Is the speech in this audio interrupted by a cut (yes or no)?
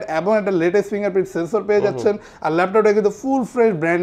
no